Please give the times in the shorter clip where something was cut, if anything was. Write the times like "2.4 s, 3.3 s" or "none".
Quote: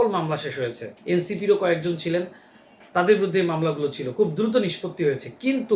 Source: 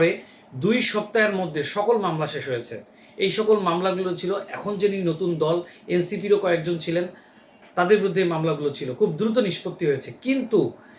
0.9 s

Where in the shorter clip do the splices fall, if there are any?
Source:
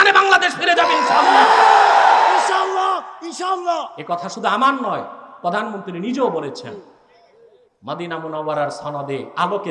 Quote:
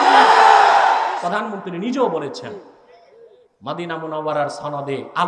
1.1 s

